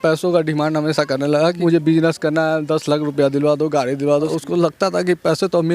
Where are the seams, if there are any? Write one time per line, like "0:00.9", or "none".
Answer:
0:01.6
0:04.3

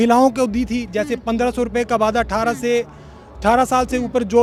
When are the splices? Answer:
none

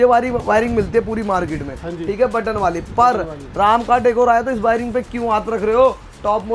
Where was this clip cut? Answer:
none

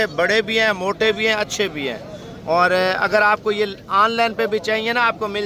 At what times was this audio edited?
none

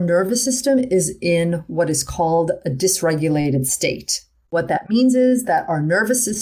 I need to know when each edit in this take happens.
0:04.5

